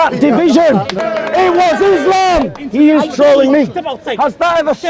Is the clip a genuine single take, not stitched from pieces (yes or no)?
no